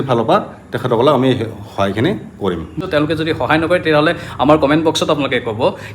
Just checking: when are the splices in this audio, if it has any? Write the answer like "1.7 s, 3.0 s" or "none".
2.7 s